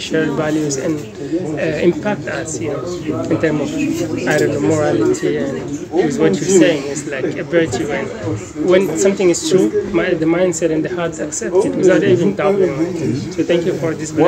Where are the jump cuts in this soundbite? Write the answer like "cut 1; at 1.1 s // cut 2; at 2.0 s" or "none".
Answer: none